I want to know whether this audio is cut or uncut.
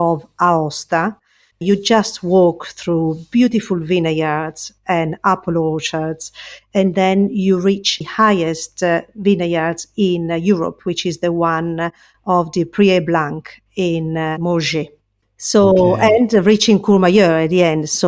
cut